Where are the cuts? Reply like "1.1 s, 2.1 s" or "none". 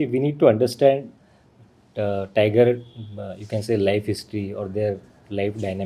none